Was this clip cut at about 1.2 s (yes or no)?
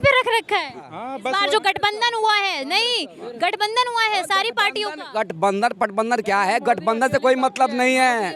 yes